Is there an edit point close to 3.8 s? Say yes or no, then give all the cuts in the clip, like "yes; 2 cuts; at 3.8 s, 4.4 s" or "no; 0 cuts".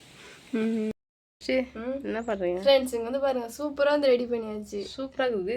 no; 1 cut; at 1.0 s